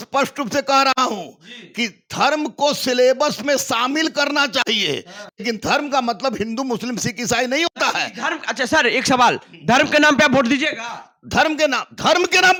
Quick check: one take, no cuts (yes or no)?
yes